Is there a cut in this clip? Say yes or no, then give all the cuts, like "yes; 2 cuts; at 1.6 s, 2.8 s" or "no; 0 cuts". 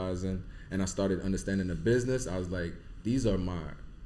no; 0 cuts